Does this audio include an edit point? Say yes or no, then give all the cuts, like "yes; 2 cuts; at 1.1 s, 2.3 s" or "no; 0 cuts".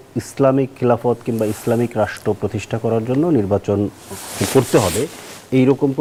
no; 0 cuts